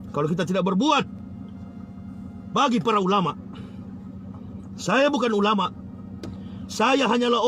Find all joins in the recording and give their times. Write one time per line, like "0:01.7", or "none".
none